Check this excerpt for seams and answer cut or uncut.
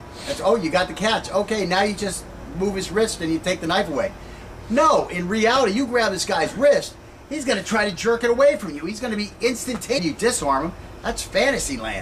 uncut